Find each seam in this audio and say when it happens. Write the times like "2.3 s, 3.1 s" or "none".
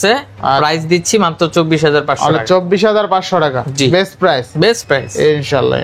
none